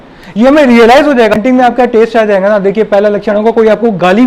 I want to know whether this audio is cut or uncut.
cut